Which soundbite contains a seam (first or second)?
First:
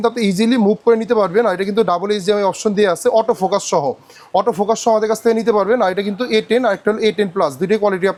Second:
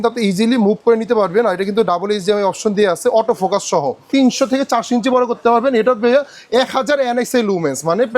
second